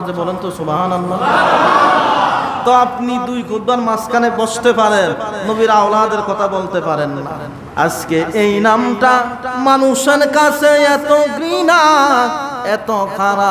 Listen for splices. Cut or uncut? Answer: cut